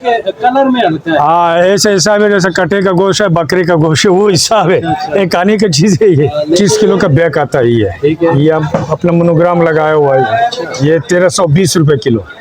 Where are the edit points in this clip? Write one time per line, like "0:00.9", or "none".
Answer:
0:06.6